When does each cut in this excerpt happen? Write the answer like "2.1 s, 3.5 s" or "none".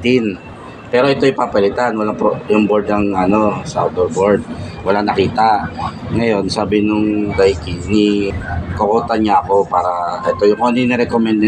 8.3 s